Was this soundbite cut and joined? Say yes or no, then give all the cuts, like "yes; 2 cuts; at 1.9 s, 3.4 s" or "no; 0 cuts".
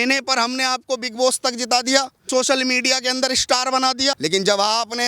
yes; 2 cuts; at 2.3 s, 4.2 s